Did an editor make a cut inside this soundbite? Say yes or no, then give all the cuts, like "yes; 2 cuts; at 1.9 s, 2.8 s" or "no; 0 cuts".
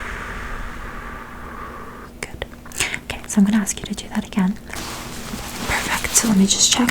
yes; 1 cut; at 4.7 s